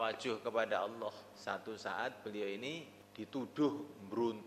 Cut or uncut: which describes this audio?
cut